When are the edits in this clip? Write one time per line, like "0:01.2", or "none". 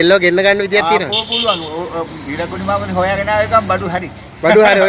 none